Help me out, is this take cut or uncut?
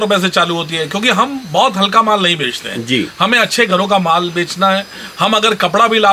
uncut